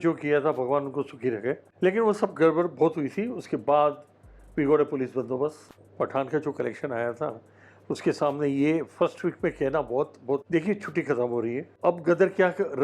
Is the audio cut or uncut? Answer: cut